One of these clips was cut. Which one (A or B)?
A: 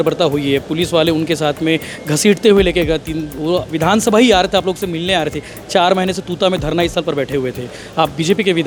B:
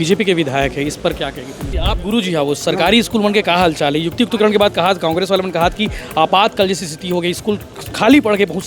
B